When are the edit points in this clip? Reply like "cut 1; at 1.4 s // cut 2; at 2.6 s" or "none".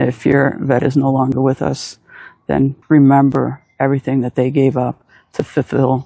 cut 1; at 2.8 s